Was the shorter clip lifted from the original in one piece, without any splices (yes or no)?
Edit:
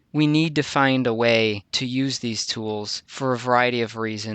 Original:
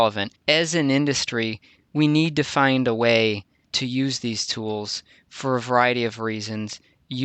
no